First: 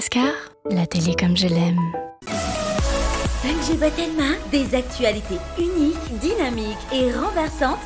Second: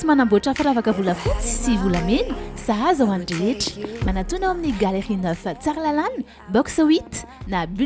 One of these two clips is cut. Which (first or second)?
first